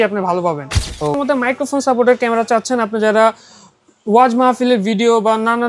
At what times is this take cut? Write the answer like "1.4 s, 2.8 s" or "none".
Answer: 1.1 s